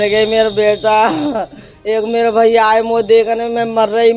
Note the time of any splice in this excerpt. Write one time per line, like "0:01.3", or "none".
none